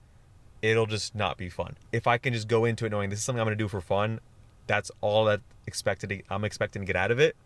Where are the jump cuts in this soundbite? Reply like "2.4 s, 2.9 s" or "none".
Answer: 1.7 s